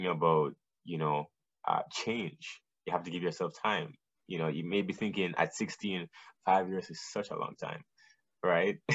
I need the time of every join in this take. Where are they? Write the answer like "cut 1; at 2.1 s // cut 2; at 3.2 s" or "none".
none